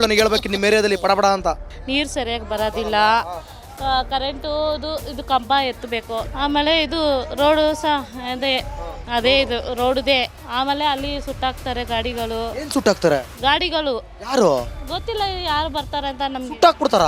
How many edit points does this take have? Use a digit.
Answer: 3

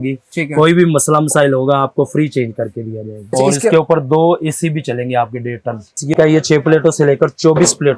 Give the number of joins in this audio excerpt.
2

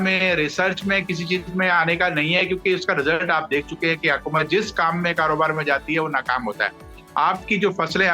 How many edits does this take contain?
0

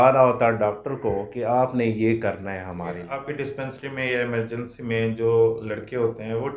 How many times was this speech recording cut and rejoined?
1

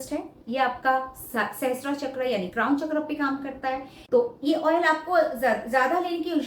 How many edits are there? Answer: 1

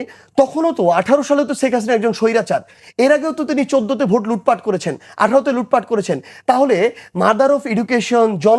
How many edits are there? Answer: 0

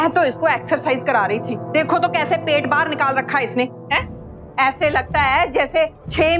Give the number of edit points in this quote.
0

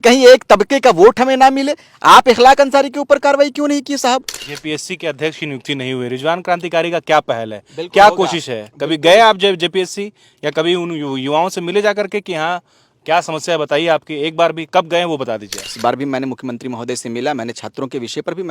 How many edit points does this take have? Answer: 2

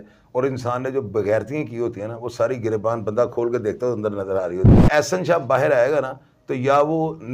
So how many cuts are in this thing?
1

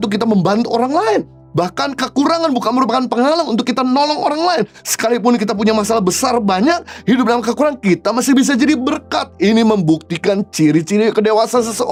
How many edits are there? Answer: 0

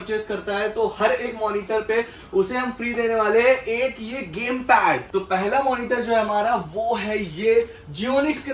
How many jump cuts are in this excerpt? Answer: 1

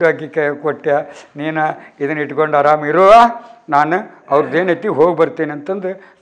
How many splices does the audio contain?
0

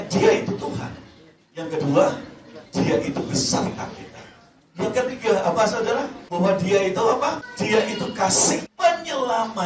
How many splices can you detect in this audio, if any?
3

